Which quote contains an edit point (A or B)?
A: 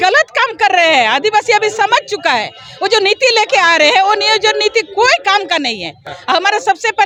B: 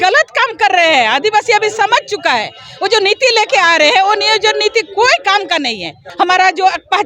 B